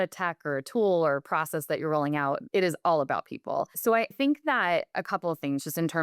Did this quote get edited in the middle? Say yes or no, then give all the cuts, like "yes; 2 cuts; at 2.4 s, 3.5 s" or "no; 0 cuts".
yes; 1 cut; at 3.7 s